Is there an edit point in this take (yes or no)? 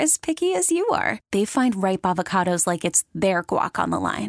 no